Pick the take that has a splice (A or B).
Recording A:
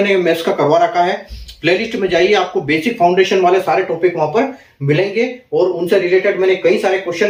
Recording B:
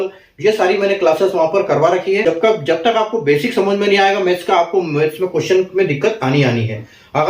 B